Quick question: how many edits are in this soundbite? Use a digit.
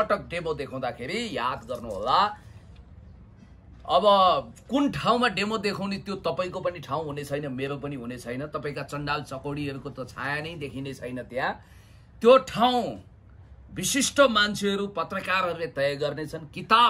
0